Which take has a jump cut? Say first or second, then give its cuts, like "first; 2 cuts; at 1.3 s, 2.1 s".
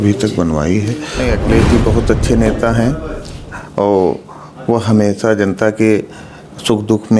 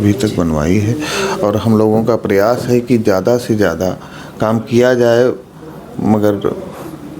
first; 1 cut; at 1.0 s